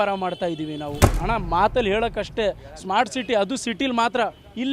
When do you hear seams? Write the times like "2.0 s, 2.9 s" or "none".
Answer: 1.1 s